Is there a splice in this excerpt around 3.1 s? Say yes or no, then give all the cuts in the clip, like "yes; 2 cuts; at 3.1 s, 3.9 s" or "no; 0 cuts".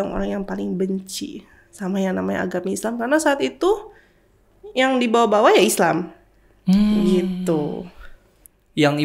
no; 0 cuts